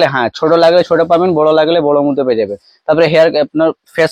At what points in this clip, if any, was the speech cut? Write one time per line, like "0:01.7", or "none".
none